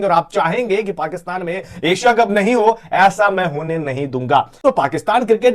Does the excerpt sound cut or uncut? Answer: cut